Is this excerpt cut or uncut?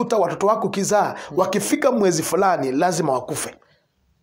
uncut